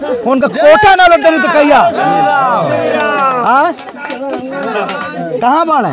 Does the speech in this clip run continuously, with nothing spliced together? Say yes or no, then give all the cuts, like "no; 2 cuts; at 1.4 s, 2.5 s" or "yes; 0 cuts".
yes; 0 cuts